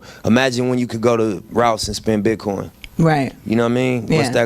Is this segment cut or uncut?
uncut